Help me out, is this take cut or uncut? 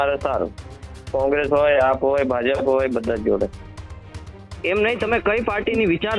uncut